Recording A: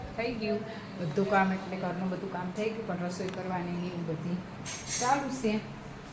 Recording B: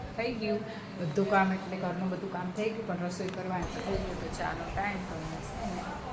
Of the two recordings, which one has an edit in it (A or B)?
B